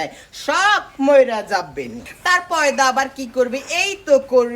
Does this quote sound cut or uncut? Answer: cut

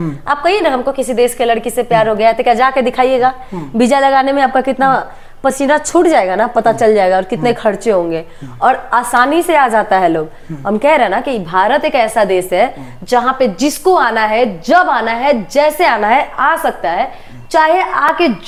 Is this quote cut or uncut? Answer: uncut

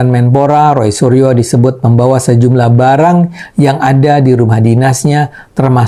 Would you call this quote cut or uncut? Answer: uncut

